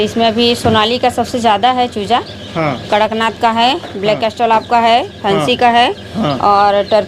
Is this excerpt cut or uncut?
uncut